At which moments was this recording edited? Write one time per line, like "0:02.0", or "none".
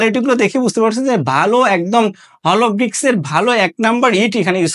none